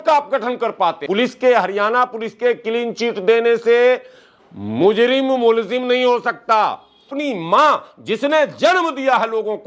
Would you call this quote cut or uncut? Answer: cut